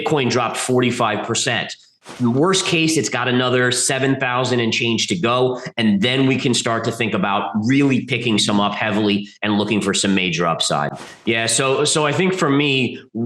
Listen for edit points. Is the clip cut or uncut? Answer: cut